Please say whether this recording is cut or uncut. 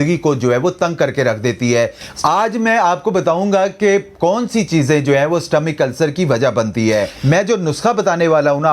cut